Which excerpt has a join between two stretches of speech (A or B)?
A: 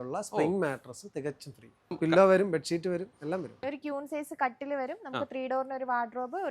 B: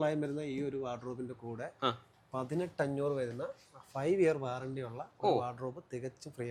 A